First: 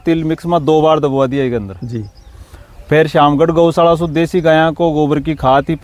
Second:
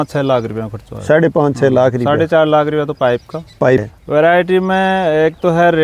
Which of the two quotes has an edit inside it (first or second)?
second